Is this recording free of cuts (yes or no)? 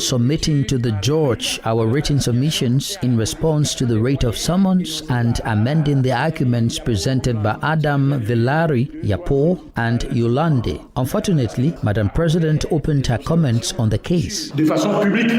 no